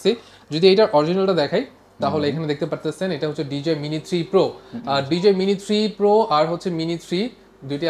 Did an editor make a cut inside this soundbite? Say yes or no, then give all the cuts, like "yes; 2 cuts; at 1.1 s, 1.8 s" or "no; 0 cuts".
no; 0 cuts